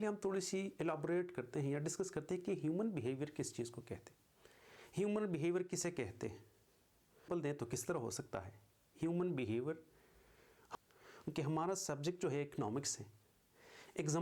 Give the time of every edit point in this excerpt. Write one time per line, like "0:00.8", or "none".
0:07.3
0:10.8